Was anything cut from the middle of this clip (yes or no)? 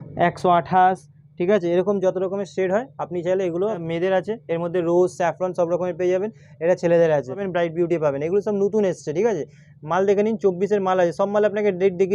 yes